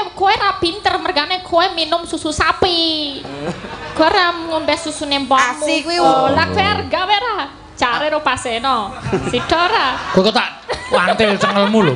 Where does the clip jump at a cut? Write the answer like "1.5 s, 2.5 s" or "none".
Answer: 6.0 s